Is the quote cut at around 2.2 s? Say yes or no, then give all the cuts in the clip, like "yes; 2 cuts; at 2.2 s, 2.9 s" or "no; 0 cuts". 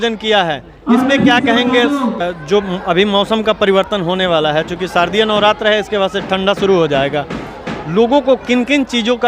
yes; 1 cut; at 2.2 s